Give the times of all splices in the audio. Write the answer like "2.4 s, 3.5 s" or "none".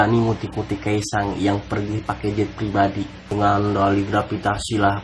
none